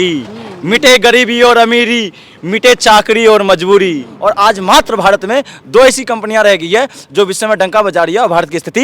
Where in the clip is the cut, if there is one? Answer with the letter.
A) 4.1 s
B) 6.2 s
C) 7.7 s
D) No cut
A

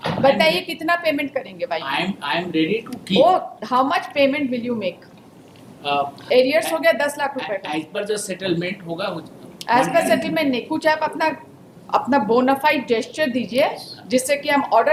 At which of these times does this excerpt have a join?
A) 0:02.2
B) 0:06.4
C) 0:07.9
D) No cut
D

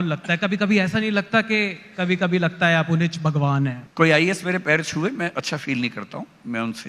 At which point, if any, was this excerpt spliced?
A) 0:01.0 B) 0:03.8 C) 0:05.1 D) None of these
B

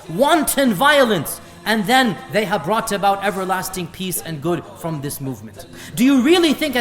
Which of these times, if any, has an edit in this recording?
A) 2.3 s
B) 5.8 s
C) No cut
B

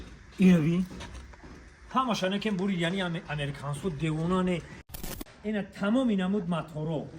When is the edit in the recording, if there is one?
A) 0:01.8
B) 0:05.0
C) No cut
B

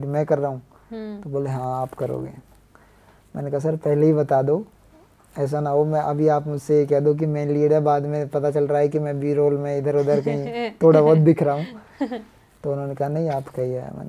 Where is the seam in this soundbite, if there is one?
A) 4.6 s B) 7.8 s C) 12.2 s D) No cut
D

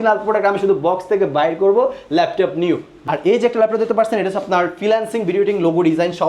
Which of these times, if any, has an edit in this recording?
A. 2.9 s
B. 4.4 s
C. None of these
A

